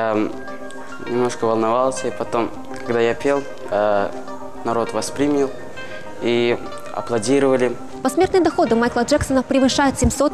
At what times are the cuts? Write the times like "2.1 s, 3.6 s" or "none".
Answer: 7.9 s